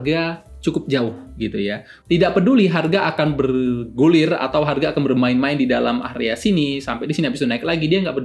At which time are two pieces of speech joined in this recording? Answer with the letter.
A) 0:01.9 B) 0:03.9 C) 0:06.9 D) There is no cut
A